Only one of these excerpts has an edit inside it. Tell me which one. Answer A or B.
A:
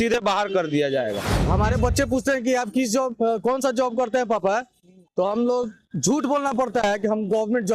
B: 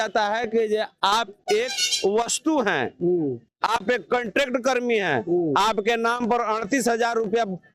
A